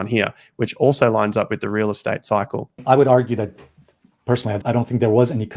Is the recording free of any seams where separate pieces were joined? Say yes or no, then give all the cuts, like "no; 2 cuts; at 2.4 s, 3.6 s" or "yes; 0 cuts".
no; 2 cuts; at 2.7 s, 4.6 s